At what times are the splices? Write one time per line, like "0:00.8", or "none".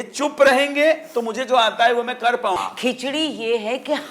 0:02.6